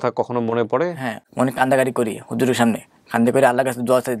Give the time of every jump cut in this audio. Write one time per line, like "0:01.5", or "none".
0:01.2